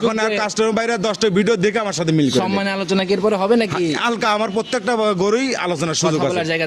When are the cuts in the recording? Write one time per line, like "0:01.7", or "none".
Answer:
none